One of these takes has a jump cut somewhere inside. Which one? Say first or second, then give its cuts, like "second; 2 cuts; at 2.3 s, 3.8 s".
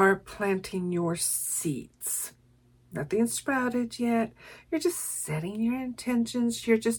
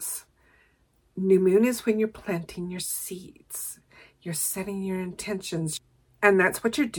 second; 1 cut; at 5.7 s